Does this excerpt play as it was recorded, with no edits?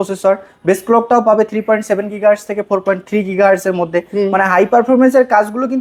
yes; 0 cuts

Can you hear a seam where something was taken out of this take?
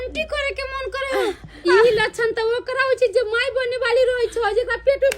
yes; 1 cut; at 1.6 s

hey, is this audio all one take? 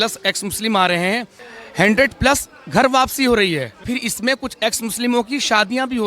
no; 2 cuts; at 1.6 s, 3.8 s

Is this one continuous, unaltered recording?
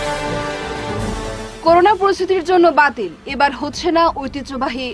no; 1 cut; at 1.2 s

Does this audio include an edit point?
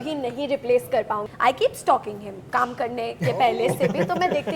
yes; 1 cut; at 1.2 s

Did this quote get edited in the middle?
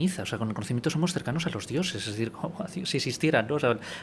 no; 0 cuts

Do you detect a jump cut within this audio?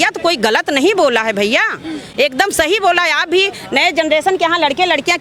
no; 0 cuts

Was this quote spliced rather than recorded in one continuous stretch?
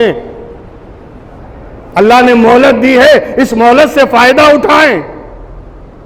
no; 0 cuts

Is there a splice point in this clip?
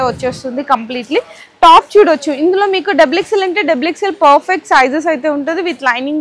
no; 0 cuts

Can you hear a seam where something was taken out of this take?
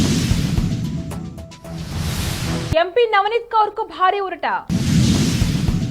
yes; 1 cut; at 2.7 s

